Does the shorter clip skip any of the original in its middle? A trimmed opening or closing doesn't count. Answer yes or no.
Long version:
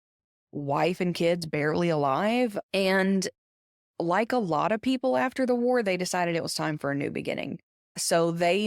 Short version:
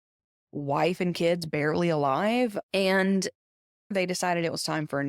yes